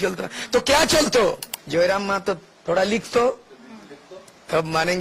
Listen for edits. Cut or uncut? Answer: cut